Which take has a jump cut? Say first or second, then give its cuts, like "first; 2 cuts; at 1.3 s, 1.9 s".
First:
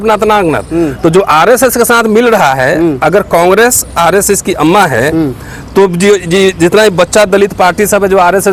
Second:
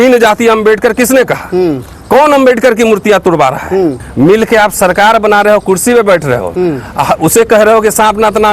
second; 1 cut; at 4.0 s